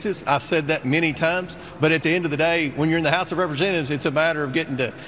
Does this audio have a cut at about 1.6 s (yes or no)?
yes